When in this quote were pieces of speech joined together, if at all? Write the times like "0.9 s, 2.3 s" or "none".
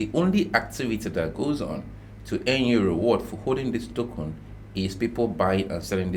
none